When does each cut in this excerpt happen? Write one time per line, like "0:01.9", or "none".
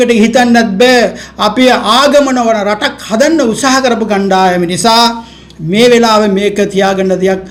none